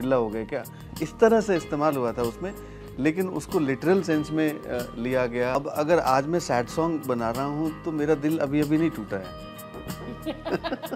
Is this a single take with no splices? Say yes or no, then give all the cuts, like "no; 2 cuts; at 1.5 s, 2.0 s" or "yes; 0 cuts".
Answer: no; 1 cut; at 5.6 s